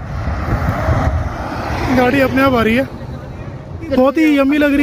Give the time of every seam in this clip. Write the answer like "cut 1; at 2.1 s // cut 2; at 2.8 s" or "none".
cut 1; at 3.9 s